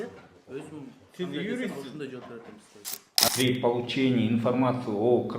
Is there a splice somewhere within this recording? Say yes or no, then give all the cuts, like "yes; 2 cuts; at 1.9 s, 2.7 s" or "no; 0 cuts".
yes; 1 cut; at 3.2 s